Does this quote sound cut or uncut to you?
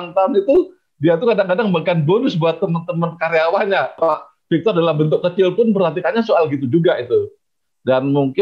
cut